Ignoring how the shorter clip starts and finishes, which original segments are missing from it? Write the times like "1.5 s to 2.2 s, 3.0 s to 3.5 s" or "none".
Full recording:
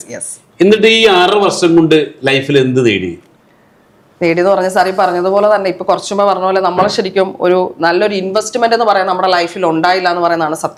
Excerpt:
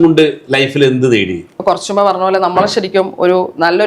3.3 s to 5.8 s